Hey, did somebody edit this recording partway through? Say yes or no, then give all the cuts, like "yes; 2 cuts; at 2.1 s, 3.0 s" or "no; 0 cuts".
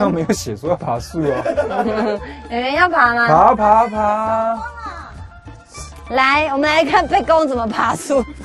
no; 0 cuts